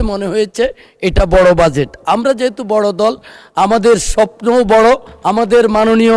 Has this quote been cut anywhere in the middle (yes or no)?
yes